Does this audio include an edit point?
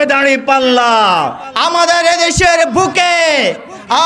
yes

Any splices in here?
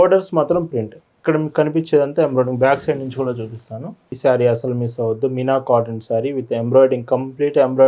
yes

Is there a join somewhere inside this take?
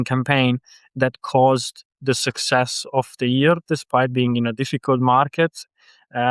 no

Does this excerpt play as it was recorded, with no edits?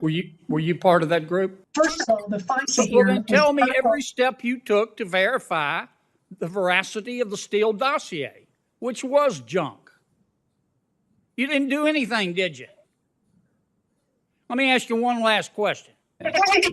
no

